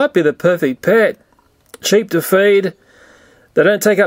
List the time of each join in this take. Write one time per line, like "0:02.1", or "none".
none

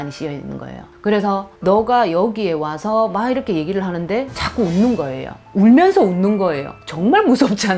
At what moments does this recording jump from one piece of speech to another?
none

